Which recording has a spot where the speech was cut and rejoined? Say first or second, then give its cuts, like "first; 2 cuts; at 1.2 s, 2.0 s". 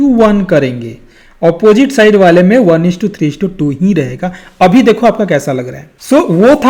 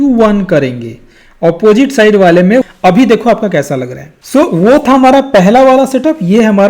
second; 1 cut; at 2.6 s